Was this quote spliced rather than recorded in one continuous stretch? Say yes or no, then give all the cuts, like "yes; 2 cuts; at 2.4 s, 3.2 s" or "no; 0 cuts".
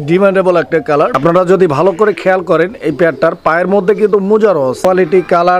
yes; 2 cuts; at 1.1 s, 4.5 s